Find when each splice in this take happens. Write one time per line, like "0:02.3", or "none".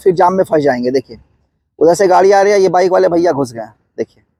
none